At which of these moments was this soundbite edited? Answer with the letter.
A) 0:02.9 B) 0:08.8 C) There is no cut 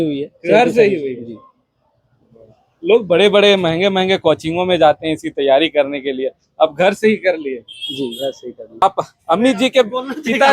B